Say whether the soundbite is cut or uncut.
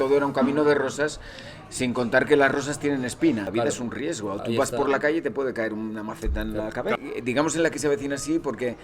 cut